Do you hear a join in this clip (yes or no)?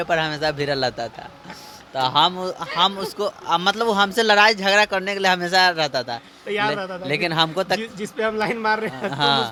no